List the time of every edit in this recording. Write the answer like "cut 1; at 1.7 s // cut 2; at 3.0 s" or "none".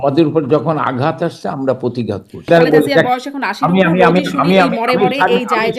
cut 1; at 2.5 s